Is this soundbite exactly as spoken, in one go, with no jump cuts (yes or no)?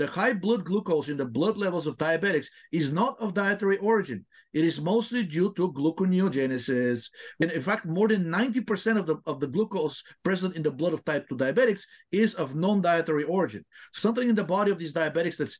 no